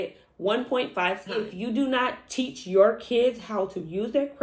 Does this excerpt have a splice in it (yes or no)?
yes